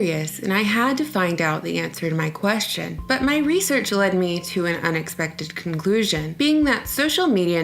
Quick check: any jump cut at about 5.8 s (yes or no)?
yes